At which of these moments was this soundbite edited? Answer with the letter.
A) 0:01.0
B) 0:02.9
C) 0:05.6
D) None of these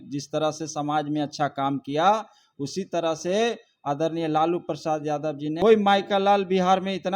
C